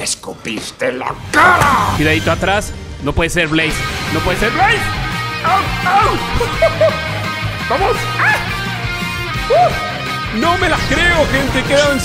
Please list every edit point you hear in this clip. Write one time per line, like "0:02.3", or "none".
0:01.9

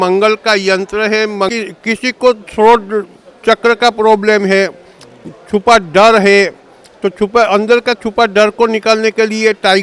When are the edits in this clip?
0:01.5

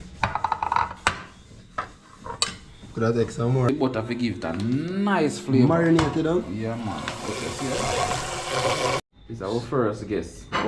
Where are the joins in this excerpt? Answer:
0:03.7
0:09.1

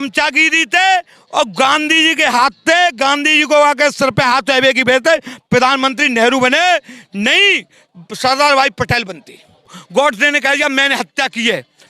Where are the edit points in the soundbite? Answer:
0:09.8

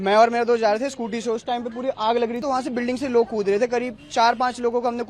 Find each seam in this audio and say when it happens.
0:02.4

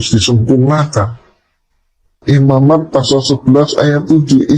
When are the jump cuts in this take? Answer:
0:02.2

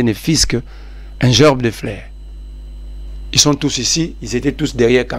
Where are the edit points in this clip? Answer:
none

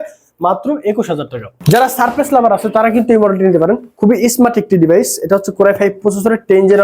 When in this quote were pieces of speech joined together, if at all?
0:01.5

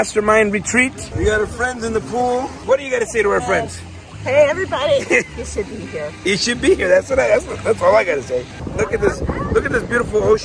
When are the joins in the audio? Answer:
0:01.0
0:02.6
0:08.6

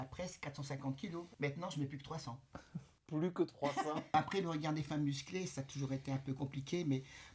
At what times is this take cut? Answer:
0:01.3
0:04.1

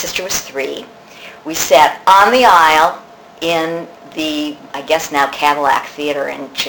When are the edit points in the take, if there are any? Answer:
none

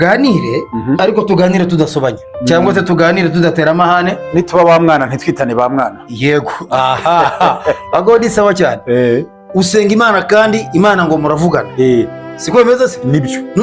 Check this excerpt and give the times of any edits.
0:01.0
0:02.3
0:09.4

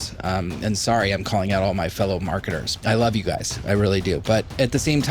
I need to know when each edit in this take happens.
0:02.7

